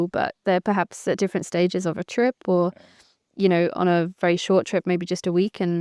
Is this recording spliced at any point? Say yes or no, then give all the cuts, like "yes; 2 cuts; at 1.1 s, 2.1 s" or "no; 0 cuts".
no; 0 cuts